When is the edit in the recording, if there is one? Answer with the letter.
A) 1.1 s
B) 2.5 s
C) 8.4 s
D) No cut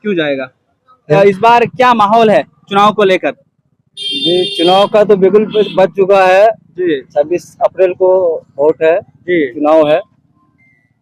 A